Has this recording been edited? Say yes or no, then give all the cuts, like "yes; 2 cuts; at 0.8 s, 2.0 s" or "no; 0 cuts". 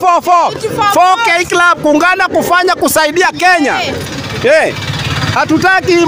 no; 0 cuts